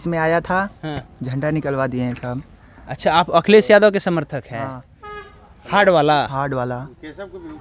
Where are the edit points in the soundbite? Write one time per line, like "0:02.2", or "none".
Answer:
none